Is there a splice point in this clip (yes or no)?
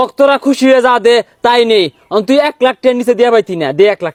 no